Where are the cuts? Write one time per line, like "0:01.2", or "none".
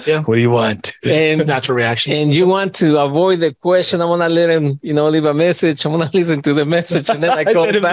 none

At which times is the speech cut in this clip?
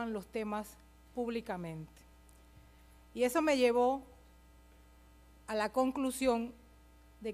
0:05.1

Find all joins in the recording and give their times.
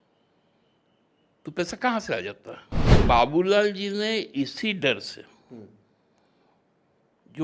0:03.0

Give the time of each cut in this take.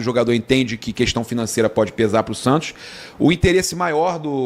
none

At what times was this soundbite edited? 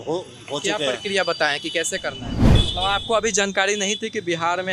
0:02.4

